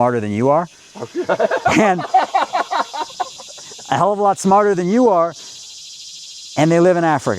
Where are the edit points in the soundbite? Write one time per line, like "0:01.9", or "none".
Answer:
none

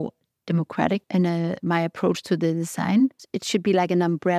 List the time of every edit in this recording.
0:01.0
0:03.3

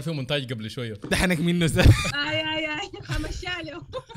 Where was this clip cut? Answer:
0:01.1
0:02.2

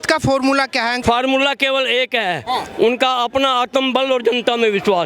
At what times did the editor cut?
0:01.0

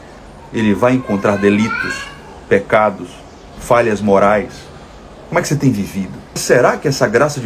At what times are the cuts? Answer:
0:06.4

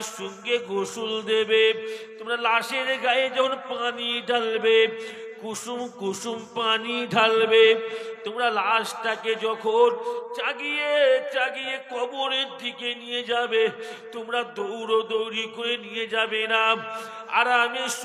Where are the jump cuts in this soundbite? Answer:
none

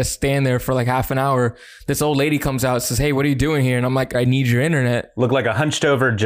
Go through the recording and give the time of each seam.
0:04.1
0:05.1

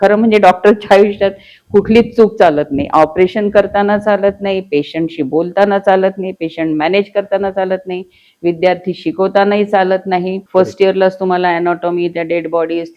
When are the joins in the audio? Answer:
0:10.4

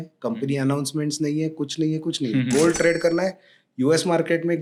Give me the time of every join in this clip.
none

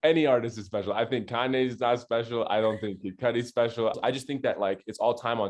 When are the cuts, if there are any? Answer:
0:04.0

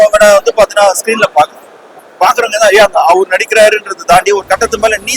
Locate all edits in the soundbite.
none

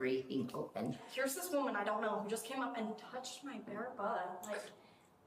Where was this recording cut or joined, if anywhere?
0:01.0

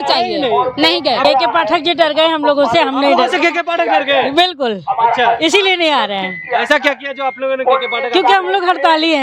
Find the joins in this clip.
0:01.2

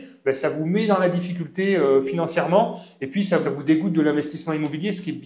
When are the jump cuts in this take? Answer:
0:03.5

